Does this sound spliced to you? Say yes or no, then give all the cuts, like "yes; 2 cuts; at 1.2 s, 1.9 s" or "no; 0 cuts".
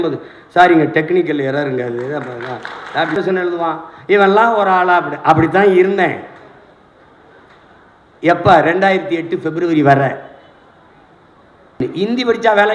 yes; 2 cuts; at 3.2 s, 11.8 s